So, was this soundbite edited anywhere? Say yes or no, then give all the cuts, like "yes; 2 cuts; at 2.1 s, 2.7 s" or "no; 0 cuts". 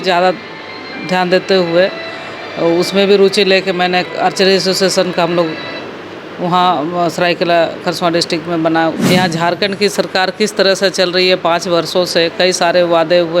yes; 1 cut; at 9.0 s